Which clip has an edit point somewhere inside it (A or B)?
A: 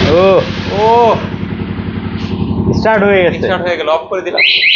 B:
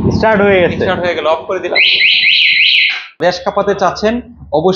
B